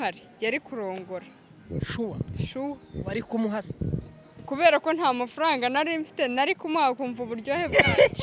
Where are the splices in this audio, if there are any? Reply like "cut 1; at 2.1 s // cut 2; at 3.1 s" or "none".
none